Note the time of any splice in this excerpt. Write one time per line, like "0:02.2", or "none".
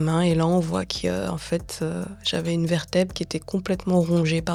none

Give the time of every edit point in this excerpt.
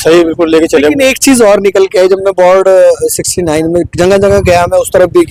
none

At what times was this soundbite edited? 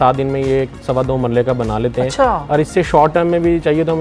none

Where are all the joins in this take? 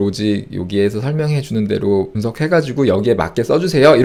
none

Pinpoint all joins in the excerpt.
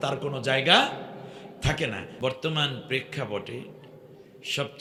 none

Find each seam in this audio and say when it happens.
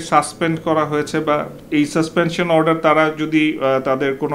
0:01.6

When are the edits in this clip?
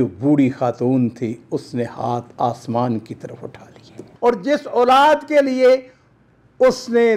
0:04.1

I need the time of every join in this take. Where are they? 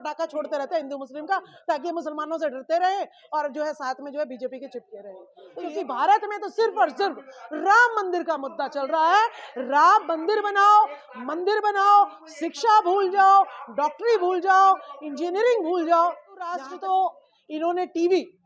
0:05.7
0:16.7

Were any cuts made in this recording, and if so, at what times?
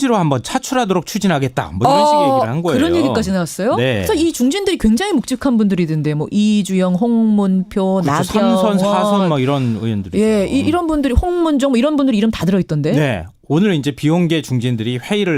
none

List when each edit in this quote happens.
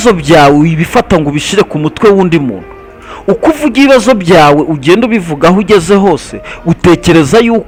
none

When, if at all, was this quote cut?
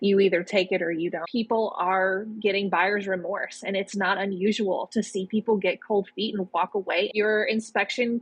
0:01.3
0:07.1

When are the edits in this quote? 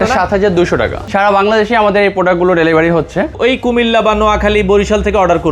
0:01.0
0:03.3

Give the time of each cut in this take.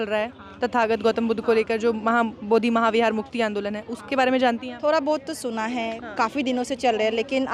none

